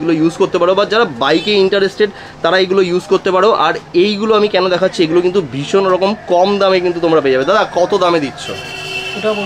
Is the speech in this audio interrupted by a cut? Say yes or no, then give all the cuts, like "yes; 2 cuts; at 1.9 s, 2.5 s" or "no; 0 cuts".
no; 0 cuts